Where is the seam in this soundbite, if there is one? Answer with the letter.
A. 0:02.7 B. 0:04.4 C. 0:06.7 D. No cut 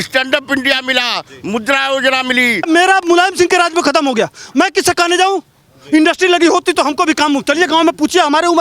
A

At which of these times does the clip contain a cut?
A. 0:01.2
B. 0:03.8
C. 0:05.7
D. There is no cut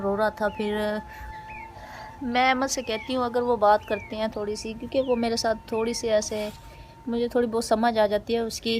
A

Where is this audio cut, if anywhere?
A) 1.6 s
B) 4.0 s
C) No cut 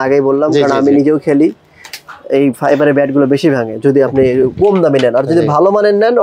C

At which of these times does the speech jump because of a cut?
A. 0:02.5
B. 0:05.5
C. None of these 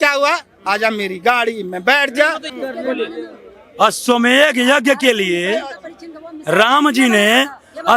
A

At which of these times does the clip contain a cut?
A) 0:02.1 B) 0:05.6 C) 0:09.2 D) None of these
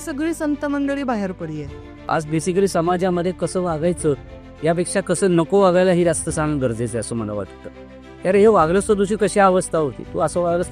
A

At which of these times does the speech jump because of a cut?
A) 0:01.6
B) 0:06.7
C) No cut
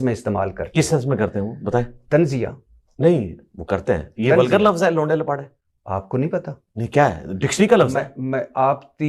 C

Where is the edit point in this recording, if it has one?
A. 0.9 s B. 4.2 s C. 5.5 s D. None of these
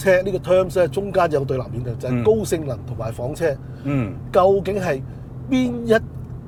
D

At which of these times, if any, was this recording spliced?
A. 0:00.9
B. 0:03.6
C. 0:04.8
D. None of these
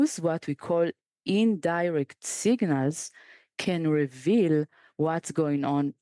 D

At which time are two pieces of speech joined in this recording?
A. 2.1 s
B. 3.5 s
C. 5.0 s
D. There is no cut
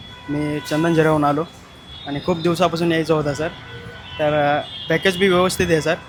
D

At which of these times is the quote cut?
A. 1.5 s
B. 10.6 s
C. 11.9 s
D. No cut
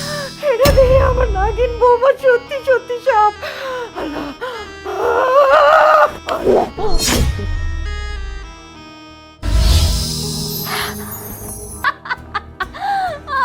C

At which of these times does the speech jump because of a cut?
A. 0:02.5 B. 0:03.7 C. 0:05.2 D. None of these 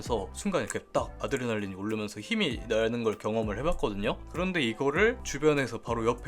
C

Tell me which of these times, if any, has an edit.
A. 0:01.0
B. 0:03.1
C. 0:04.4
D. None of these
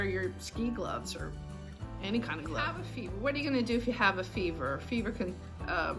D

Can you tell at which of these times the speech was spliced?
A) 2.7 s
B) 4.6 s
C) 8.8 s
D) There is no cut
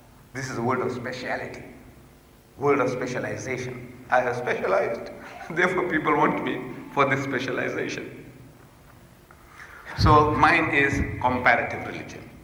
B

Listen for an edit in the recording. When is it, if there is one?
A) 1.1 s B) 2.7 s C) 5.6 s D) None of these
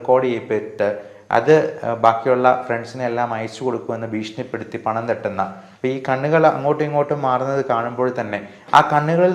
C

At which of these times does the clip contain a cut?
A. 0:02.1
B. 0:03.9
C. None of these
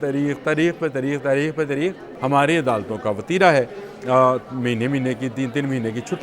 A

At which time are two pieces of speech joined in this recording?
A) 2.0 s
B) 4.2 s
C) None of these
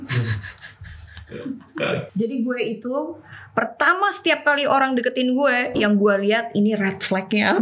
A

